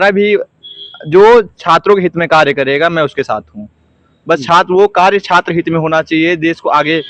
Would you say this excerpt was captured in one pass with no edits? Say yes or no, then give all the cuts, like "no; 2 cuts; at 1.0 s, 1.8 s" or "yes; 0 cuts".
yes; 0 cuts